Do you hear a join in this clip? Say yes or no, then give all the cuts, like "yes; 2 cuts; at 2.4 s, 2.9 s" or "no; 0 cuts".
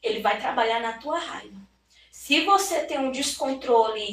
no; 0 cuts